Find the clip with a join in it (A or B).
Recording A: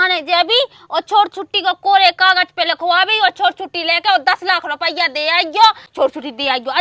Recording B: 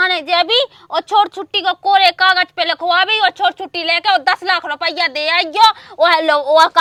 A